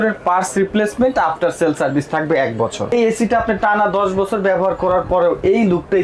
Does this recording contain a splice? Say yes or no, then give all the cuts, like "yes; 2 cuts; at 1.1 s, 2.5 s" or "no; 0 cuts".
yes; 1 cut; at 2.9 s